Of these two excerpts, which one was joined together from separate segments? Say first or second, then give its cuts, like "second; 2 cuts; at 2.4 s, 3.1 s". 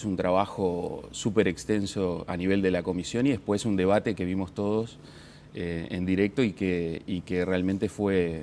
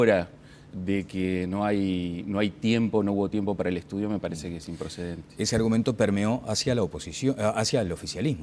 second; 1 cut; at 1.6 s